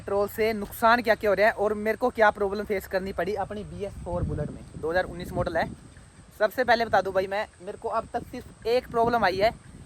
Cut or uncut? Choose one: uncut